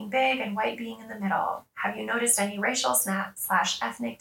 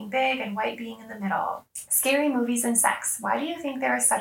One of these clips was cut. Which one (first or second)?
second